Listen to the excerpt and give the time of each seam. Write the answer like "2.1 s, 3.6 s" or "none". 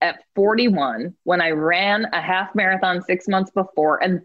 1.1 s